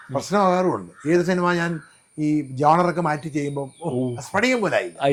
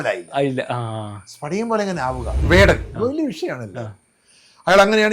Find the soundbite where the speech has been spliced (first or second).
second